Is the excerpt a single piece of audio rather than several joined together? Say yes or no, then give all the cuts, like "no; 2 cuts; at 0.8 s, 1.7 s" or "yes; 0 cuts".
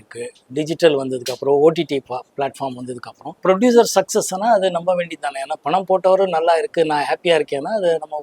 no; 1 cut; at 3.3 s